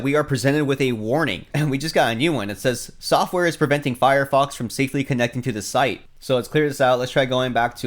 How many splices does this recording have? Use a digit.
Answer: 1